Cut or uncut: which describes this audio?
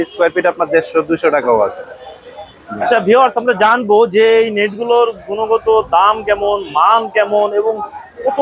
uncut